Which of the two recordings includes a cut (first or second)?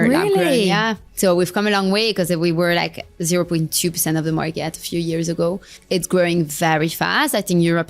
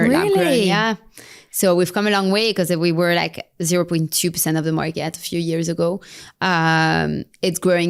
first